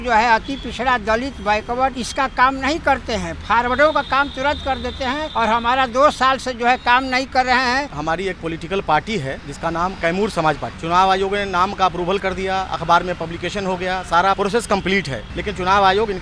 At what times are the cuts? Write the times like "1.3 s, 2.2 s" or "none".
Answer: 2.0 s, 5.3 s, 7.9 s, 9.4 s, 10.7 s, 14.4 s, 15.2 s